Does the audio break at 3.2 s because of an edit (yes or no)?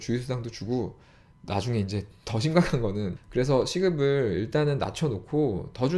yes